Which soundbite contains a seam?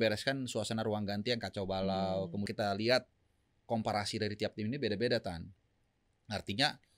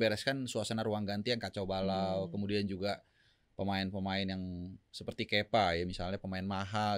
first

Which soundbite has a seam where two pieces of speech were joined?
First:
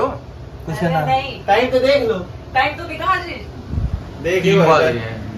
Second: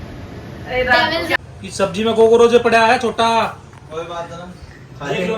second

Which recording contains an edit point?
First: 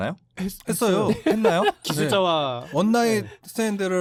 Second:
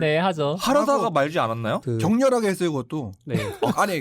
second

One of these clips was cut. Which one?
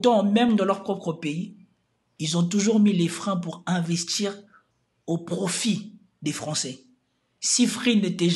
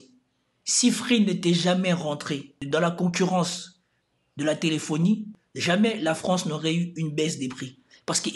second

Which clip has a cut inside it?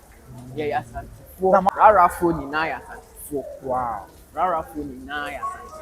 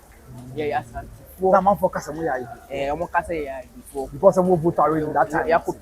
first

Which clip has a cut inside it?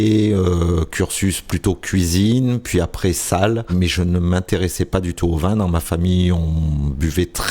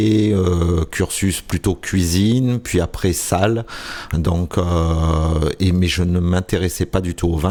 first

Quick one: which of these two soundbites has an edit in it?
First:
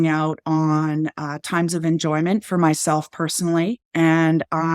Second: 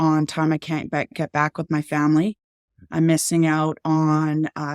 first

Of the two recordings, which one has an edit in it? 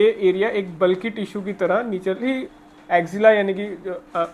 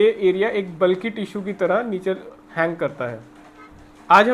first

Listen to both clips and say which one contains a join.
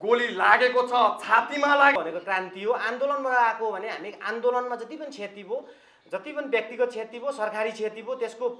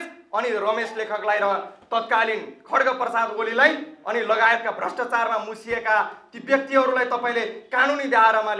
first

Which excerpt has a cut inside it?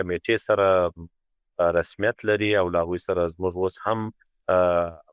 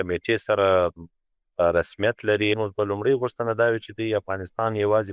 second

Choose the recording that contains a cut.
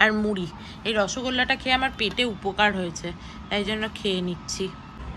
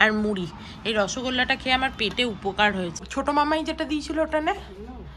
second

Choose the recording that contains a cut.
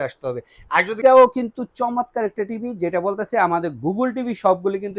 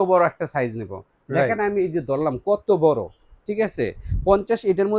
first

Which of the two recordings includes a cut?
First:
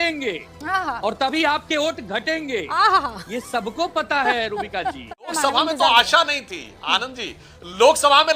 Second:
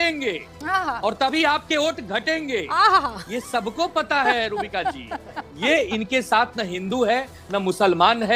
first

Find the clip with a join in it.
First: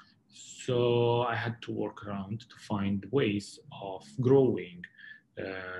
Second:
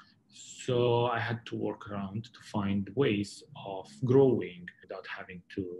second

